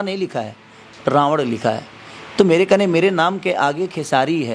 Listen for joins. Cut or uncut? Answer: uncut